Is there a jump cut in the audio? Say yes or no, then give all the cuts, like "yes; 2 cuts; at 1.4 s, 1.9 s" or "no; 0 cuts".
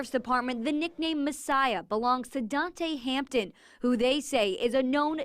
no; 0 cuts